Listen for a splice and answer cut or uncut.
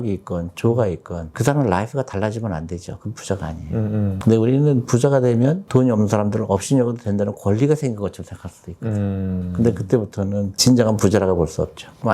uncut